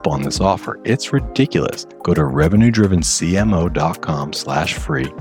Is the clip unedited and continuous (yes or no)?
no